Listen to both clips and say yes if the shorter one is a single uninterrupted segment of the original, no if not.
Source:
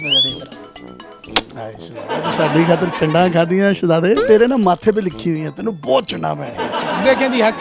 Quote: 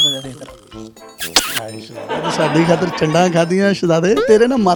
yes